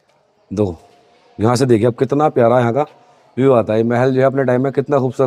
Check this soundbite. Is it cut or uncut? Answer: uncut